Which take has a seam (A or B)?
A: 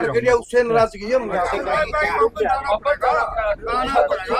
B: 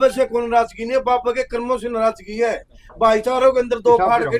A